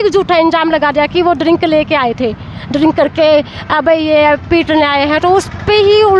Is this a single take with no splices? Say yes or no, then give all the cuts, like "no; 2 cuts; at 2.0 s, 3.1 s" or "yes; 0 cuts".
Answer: yes; 0 cuts